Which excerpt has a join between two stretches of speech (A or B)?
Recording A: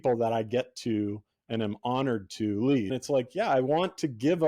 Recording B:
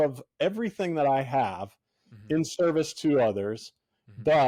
A